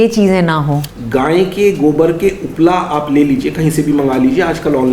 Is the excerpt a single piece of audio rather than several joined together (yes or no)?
no